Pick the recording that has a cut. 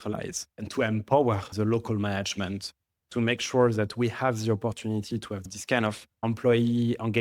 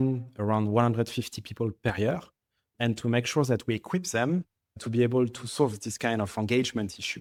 first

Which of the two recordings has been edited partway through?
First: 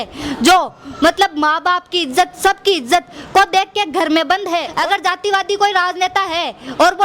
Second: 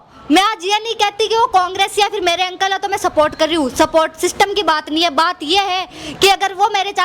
first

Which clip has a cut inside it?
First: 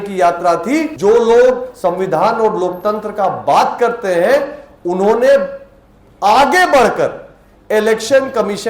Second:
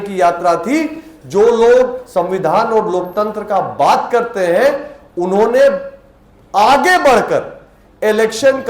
first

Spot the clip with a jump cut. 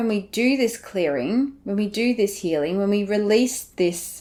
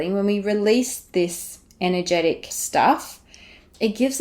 second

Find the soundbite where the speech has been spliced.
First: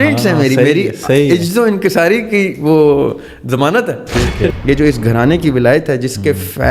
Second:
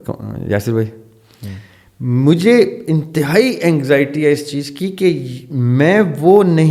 first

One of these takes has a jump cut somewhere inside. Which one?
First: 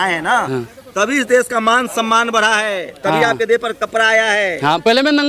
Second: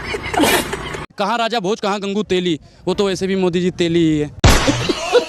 second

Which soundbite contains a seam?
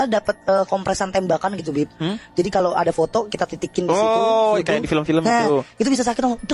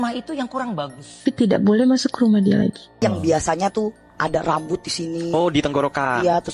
second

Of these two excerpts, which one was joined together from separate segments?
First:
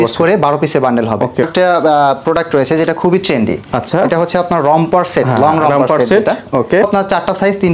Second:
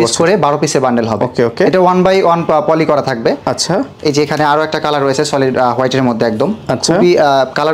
first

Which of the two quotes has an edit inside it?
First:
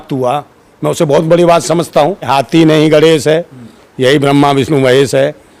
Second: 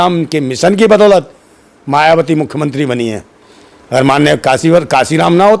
first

